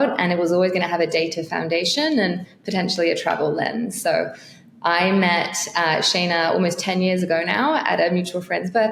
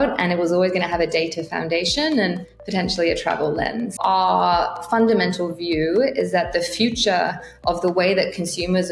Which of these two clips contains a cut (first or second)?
second